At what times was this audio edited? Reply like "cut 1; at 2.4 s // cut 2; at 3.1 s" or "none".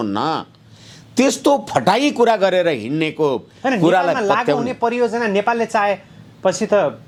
none